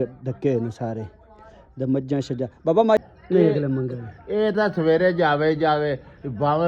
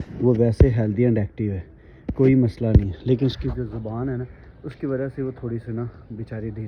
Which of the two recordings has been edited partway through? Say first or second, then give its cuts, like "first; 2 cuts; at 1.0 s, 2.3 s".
first; 1 cut; at 3.0 s